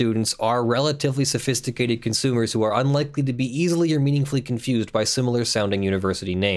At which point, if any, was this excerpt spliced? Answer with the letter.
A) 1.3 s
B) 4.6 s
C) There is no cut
C